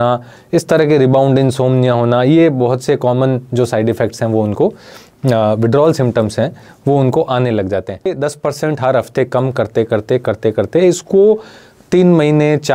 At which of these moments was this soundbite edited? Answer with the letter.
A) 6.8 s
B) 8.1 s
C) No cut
B